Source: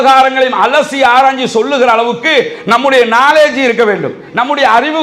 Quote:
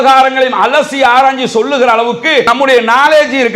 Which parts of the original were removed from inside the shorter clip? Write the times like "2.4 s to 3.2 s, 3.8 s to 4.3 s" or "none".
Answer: 2.5 s to 2.7 s